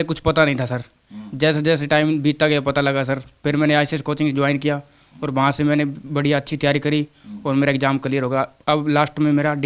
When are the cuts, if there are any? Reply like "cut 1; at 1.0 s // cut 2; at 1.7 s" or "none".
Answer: none